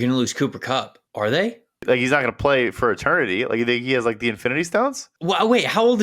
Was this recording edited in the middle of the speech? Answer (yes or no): yes